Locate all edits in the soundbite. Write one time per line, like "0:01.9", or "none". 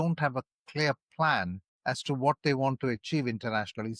0:01.6